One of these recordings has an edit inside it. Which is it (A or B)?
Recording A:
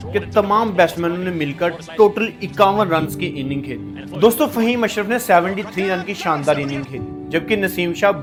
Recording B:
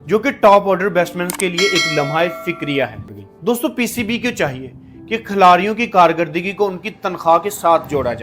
B